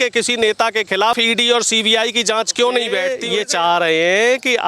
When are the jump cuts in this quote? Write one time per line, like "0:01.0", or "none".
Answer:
0:01.2
0:03.2